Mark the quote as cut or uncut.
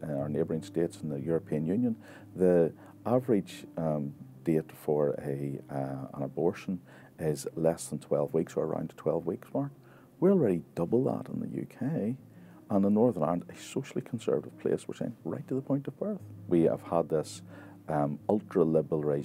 cut